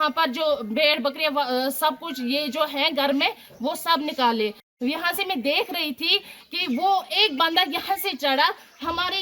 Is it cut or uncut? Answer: cut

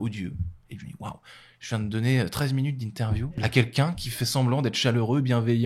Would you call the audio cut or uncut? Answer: cut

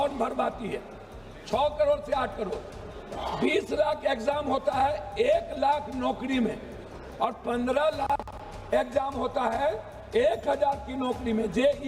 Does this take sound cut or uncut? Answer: uncut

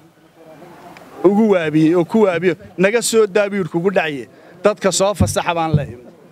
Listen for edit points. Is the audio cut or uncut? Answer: uncut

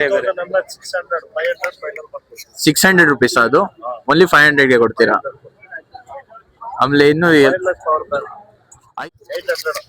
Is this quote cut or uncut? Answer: cut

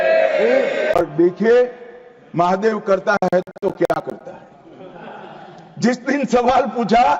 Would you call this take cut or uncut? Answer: cut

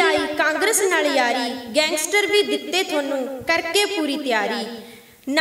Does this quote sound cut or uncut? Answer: uncut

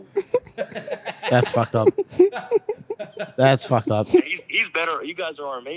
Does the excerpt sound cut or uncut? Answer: uncut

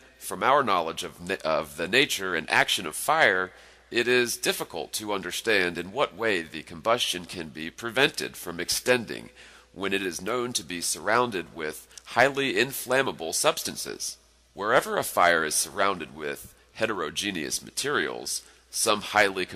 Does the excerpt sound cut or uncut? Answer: uncut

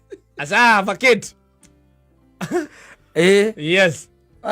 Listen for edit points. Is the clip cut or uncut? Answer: uncut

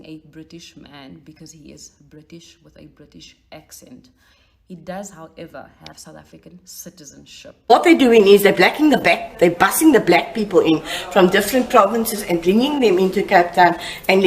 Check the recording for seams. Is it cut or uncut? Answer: cut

